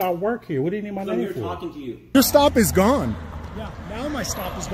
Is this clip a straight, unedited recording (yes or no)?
no